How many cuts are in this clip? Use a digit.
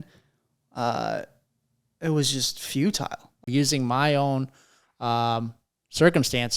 1